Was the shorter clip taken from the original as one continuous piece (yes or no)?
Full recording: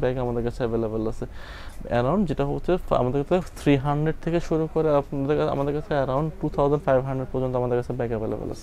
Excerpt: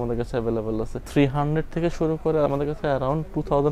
no